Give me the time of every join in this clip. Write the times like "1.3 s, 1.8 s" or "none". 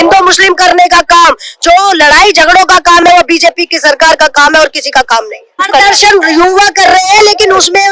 5.7 s

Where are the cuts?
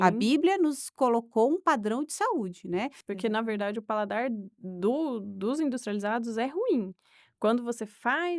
3.0 s

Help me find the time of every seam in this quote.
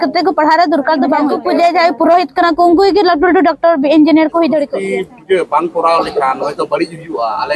1.4 s, 4.8 s

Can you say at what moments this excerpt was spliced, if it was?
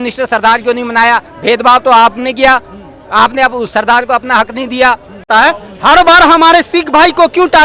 5.3 s

